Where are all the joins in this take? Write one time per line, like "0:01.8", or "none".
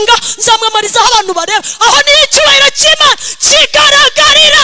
none